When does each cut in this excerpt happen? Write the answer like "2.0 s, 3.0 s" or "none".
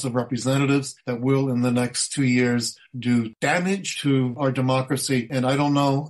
3.5 s, 5.3 s

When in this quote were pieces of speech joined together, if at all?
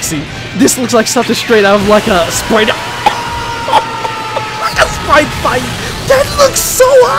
none

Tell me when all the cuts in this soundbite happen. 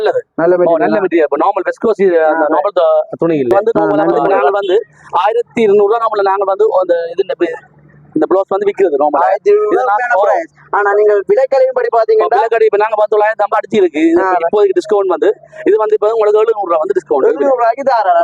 4.5 s

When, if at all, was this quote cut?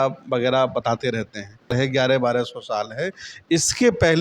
1.7 s

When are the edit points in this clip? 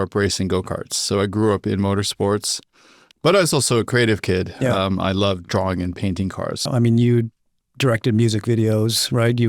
6.6 s

